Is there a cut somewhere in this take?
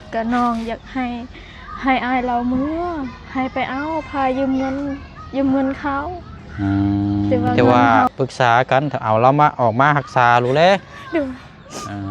yes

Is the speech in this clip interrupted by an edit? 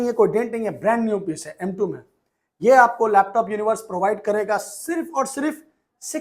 no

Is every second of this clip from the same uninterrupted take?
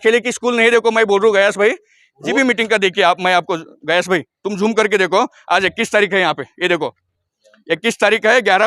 no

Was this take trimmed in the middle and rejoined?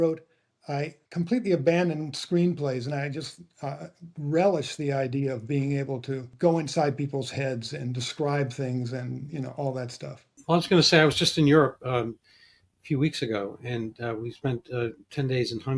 yes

